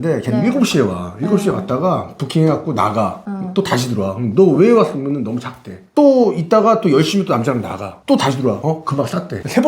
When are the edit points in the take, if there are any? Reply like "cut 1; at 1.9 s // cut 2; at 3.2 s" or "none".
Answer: none